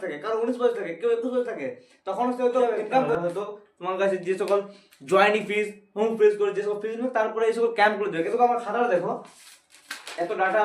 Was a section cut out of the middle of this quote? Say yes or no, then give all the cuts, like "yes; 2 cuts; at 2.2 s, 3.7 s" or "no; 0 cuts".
yes; 1 cut; at 3.1 s